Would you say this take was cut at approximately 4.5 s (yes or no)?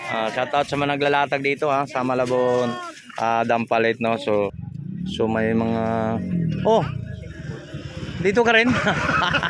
yes